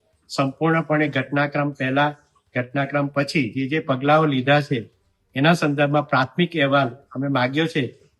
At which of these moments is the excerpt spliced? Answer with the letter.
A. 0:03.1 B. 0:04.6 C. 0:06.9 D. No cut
D